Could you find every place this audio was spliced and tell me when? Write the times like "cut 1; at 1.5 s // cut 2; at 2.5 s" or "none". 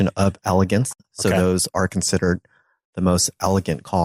none